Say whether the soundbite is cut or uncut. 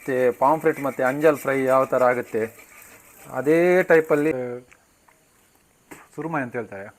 cut